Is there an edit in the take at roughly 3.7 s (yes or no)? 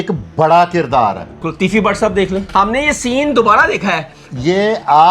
no